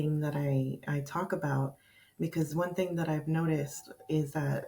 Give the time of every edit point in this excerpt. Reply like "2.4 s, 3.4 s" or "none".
none